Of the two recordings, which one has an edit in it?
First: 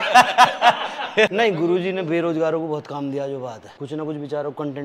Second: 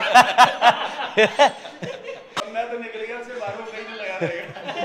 first; 2 cuts; at 1.3 s, 3.7 s

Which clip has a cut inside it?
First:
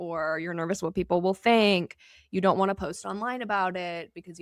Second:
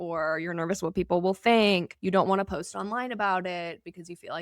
second; 1 cut; at 1.9 s

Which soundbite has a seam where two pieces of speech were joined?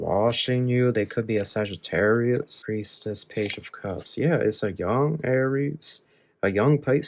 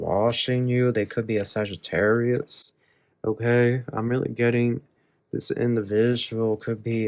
first; 1 cut; at 2.6 s

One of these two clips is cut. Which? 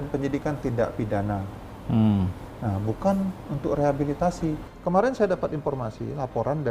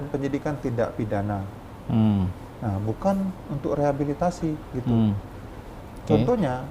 first; 1 cut; at 4.7 s

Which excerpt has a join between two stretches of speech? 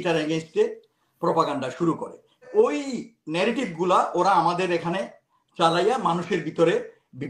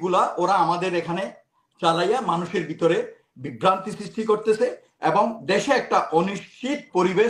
first; 1 cut; at 2.5 s

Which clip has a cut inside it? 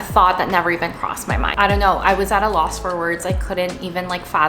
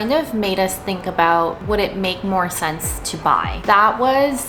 first; 1 cut; at 1.5 s

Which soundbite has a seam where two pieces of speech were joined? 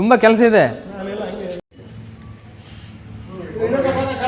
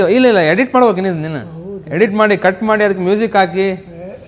first; 1 cut; at 1.6 s

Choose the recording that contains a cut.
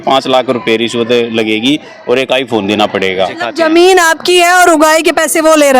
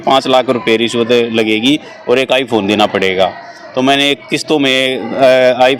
first; 1 cut; at 3.4 s

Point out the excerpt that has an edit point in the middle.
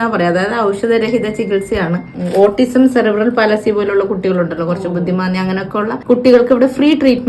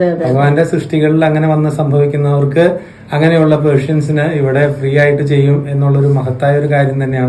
first; 1 cut; at 2.1 s

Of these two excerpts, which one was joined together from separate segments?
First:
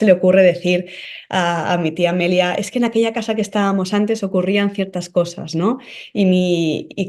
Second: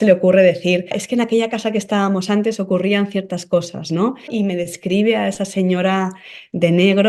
second; 2 cuts; at 1.0 s, 4.3 s

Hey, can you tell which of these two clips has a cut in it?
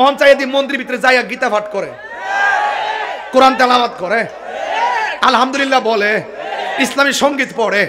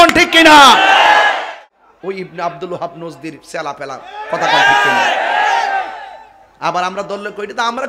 second; 1 cut; at 1.5 s

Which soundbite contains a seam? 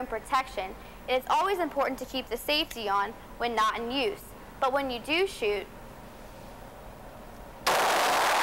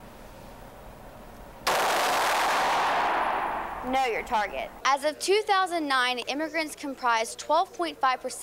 second; 1 cut; at 4.7 s

